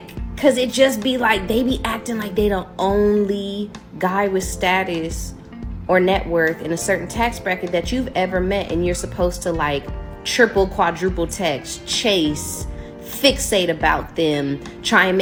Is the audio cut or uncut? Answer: uncut